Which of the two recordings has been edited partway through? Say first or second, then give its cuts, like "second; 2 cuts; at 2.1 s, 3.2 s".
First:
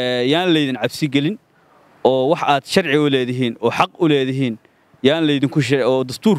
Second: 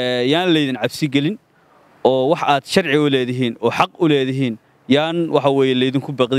second; 1 cut; at 4.7 s